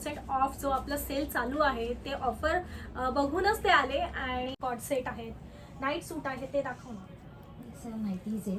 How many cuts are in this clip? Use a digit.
1